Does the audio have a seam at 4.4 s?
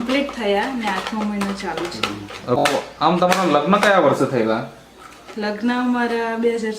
no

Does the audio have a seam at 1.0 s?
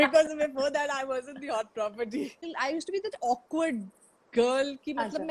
no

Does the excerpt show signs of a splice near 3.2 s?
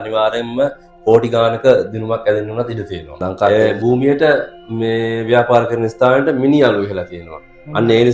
yes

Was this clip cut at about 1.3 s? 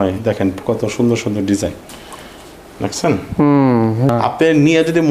no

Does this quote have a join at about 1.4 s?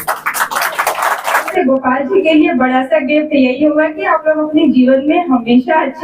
yes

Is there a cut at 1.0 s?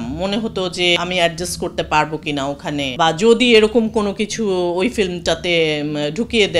yes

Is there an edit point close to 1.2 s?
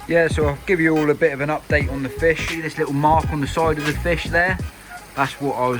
no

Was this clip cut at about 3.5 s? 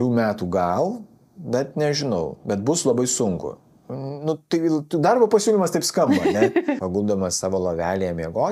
no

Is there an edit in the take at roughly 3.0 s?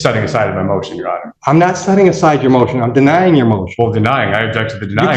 no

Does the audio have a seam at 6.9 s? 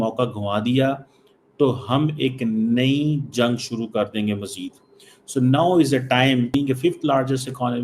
yes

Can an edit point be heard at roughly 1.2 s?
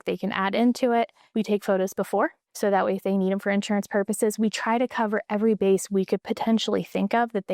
yes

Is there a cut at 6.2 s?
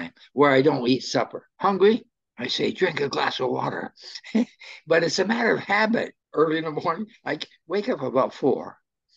yes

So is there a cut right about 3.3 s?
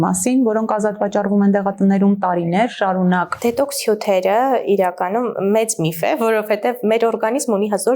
yes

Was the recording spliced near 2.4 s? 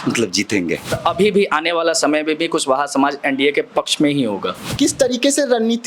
no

